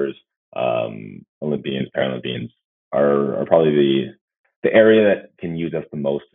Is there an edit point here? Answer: no; 0 cuts

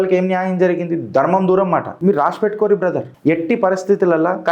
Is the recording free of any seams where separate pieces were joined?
no; 2 cuts; at 1.9 s, 3.1 s

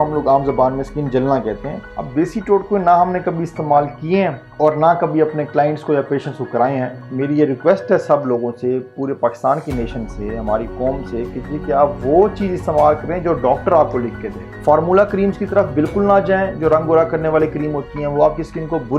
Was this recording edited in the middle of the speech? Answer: yes; 2 cuts; at 1.8 s, 7.0 s

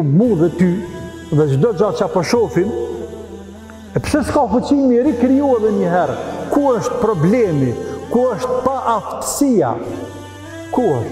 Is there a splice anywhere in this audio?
no; 0 cuts

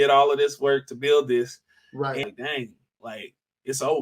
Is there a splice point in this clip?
yes; 1 cut; at 2.3 s

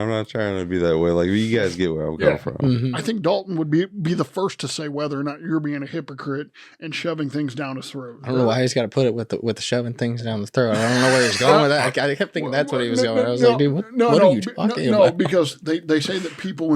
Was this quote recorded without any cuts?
no; 2 cuts; at 2.9 s, 8.2 s

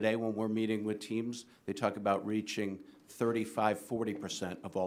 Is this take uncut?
yes; 0 cuts

